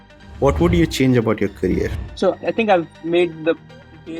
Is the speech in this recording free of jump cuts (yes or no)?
no